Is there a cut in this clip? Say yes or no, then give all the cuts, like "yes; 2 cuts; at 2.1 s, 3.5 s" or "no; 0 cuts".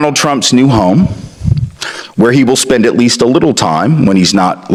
no; 0 cuts